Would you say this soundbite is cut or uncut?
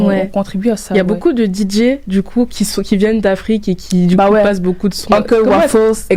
uncut